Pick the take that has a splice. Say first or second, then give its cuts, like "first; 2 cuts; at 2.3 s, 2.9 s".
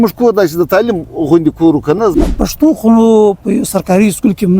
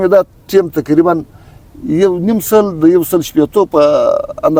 first; 1 cut; at 2.0 s